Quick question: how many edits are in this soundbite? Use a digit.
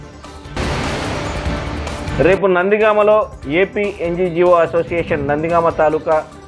0